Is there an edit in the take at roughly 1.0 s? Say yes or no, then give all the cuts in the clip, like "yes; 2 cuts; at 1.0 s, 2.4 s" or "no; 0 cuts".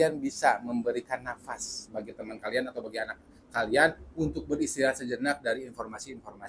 no; 0 cuts